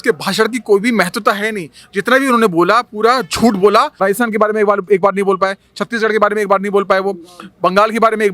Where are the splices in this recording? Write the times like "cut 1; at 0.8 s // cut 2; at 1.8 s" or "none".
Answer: cut 1; at 3.9 s